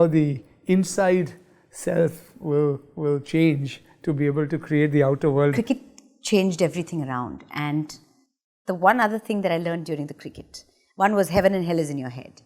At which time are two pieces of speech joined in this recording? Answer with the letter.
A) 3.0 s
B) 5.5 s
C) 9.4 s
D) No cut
B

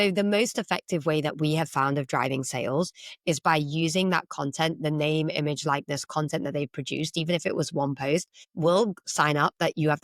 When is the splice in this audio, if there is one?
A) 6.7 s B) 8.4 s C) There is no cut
B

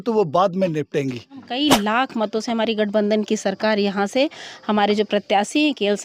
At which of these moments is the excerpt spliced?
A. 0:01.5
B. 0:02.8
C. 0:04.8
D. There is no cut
A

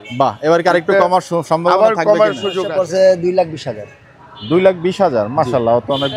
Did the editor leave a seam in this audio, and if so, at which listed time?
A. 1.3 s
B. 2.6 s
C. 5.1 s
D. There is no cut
B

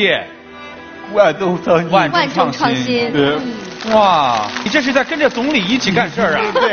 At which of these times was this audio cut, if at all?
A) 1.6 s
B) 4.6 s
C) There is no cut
B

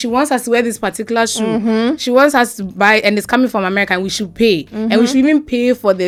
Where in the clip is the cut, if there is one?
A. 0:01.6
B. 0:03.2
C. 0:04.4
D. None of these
D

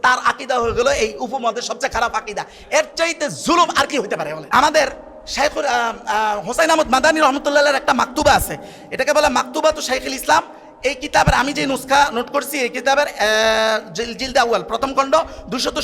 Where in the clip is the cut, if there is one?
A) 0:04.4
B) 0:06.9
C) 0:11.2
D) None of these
A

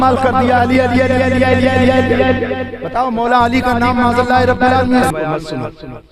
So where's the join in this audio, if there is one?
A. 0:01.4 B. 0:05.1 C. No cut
B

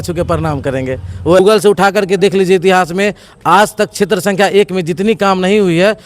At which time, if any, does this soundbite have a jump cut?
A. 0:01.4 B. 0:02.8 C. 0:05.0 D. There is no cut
A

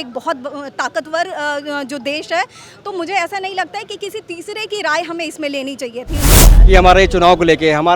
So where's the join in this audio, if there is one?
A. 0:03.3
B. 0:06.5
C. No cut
B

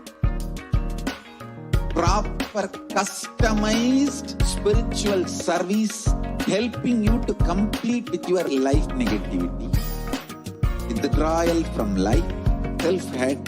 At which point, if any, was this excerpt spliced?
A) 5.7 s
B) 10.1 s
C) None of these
B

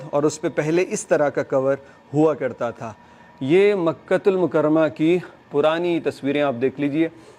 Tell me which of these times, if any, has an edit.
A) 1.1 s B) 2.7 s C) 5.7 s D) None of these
D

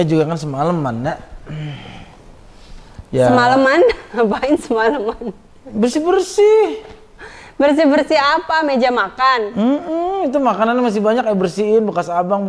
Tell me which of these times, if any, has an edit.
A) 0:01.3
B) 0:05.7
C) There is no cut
C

